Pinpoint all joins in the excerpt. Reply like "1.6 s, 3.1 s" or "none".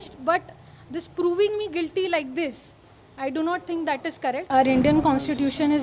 4.5 s